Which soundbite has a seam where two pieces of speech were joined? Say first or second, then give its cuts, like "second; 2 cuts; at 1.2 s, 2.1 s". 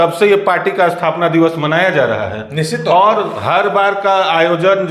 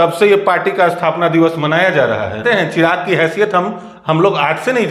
second; 1 cut; at 2.4 s